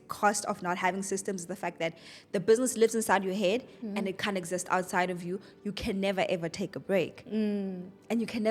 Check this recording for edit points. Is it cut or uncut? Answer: uncut